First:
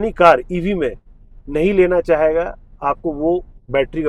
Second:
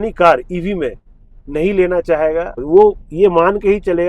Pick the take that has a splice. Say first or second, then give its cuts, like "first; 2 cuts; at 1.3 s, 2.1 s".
second; 1 cut; at 2.6 s